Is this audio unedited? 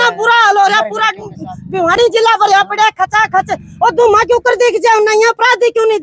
yes; 0 cuts

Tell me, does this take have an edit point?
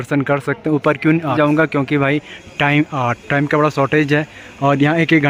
no; 0 cuts

